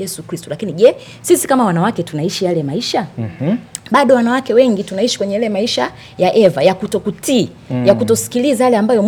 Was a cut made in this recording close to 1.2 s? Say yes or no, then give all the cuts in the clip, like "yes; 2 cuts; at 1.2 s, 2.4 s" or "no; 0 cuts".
no; 0 cuts